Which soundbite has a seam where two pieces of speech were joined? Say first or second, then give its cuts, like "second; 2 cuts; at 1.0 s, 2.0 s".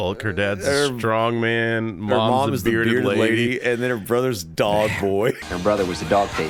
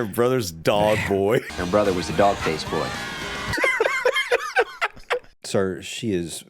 second; 2 cuts; at 3.5 s, 5.3 s